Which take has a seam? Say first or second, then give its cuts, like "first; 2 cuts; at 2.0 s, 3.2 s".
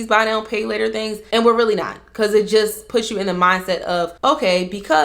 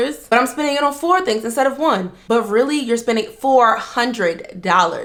first; 1 cut; at 4.1 s